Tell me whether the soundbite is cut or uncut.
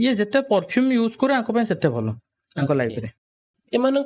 uncut